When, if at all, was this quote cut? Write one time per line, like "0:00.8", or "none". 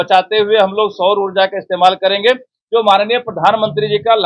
none